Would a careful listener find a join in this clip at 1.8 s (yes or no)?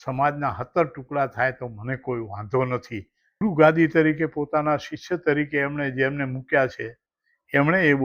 no